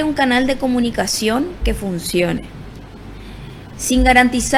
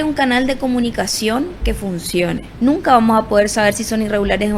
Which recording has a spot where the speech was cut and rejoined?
second; 1 cut; at 2.5 s

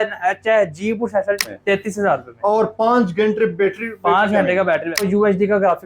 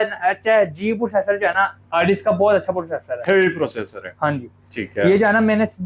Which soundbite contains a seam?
first; 2 cuts; at 1.4 s, 5.0 s

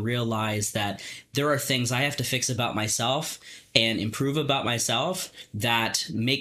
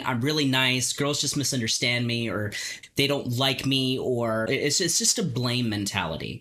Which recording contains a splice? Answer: second; 2 cuts; at 2.7 s, 4.5 s

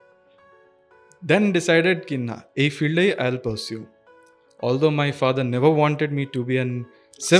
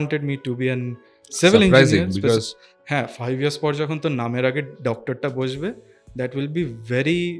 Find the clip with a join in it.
second; 1 cut; at 2.4 s

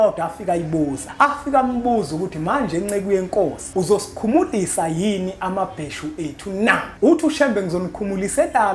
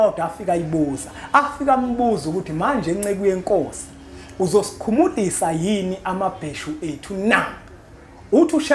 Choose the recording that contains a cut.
first; 3 cuts; at 1.0 s, 3.6 s, 6.9 s

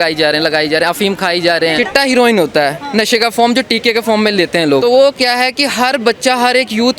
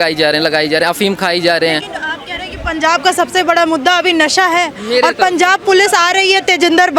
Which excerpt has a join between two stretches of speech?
first; 2 cuts; at 1.8 s, 4.8 s

